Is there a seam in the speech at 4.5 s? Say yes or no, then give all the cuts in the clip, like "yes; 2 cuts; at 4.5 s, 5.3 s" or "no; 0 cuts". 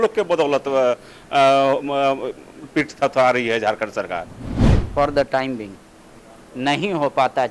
yes; 1 cut; at 4.5 s